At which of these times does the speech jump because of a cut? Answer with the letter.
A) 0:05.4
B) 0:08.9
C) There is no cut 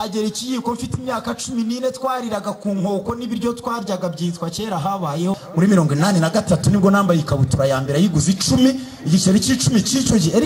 A